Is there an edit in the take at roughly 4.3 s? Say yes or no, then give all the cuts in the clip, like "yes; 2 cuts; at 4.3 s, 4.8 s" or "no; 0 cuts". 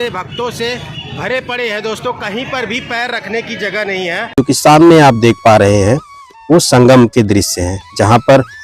yes; 1 cut; at 4.3 s